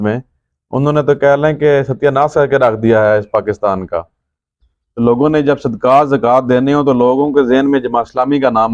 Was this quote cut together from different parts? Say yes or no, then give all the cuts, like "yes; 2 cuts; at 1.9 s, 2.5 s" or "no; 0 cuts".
yes; 1 cut; at 4.5 s